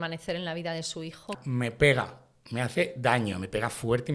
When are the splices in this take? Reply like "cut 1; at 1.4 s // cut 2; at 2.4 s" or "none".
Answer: cut 1; at 1.3 s